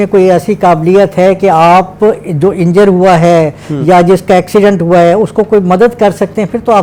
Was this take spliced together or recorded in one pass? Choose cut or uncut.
uncut